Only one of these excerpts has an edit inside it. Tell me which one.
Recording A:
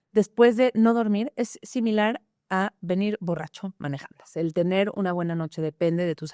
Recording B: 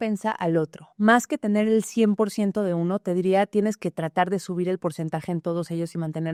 A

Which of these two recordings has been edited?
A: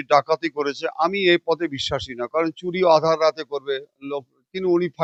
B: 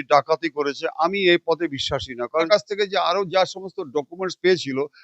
B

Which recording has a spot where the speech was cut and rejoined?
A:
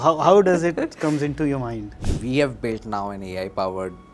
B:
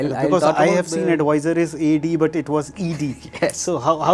A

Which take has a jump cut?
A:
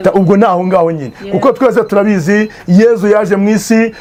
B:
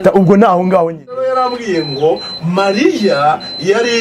B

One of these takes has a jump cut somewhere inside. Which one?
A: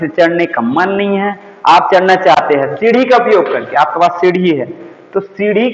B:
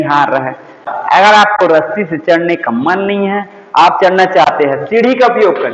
B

